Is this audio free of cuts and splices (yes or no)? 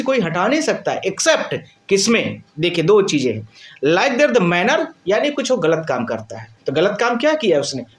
yes